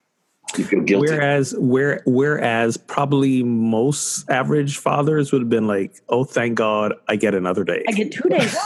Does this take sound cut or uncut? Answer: uncut